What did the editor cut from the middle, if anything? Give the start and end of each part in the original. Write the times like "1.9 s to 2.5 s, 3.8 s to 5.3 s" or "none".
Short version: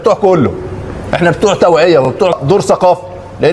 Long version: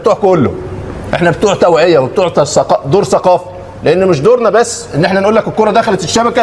2.3 s to 2.7 s